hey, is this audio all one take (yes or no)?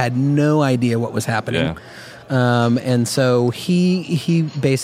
yes